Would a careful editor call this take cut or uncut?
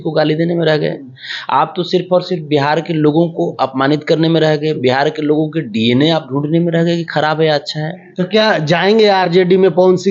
cut